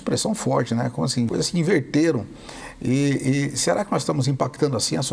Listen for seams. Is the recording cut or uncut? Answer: cut